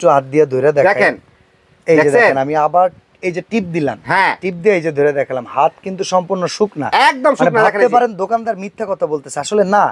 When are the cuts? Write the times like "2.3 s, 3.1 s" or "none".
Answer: none

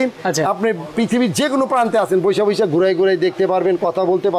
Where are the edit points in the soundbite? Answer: none

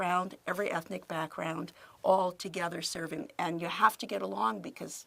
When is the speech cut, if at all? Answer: 3.2 s

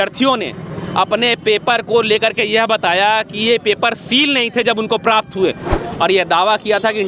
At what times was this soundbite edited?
5.7 s

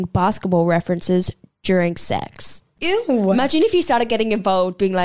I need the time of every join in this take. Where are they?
2.7 s

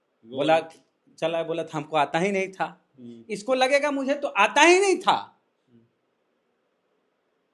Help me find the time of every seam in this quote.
none

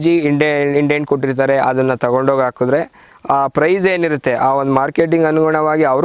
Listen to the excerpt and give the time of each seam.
none

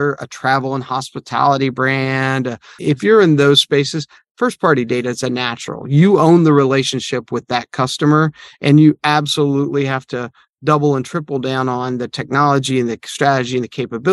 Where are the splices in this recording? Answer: 2.7 s

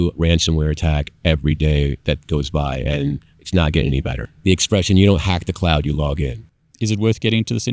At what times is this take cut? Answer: 4.2 s, 6.7 s

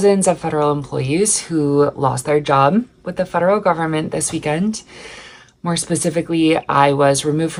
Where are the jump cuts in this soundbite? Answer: none

